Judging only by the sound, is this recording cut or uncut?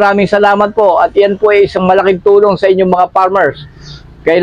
uncut